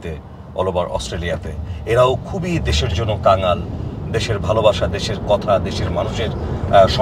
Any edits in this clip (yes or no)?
no